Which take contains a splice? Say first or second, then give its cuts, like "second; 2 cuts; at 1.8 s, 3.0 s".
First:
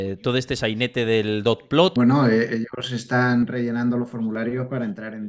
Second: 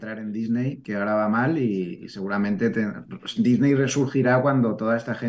first; 2 cuts; at 1.9 s, 3.4 s